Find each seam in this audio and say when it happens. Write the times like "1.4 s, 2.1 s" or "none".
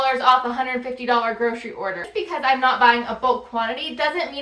2.0 s